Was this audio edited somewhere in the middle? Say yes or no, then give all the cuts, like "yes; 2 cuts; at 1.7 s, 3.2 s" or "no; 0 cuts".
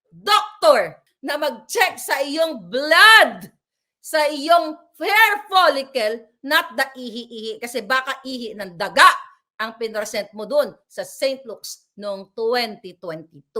yes; 1 cut; at 1.0 s